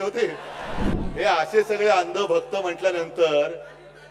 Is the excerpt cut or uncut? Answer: cut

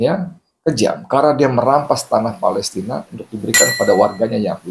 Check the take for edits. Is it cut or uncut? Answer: uncut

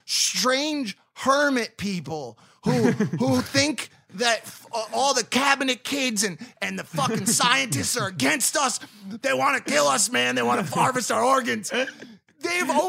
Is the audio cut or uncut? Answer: uncut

